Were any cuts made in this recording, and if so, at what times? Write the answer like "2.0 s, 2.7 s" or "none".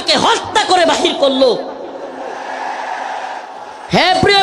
3.5 s